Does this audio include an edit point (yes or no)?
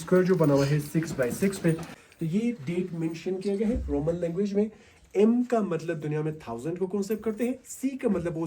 yes